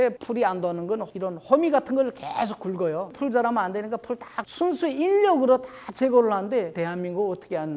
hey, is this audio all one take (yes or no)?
no